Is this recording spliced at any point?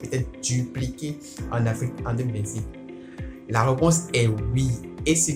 no; 0 cuts

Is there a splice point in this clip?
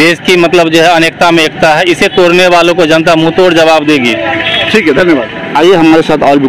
no; 0 cuts

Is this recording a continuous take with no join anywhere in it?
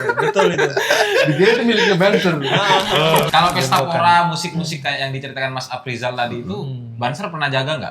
no; 1 cut; at 3.3 s

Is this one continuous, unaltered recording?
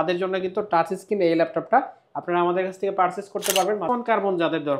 no; 1 cut; at 3.9 s

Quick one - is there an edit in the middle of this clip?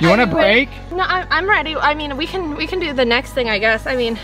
no; 0 cuts

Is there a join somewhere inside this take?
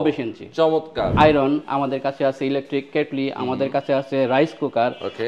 yes; 1 cut; at 1.1 s

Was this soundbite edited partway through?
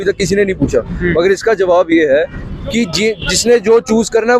no; 0 cuts

